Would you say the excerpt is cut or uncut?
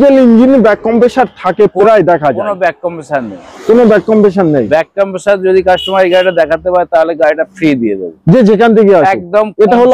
uncut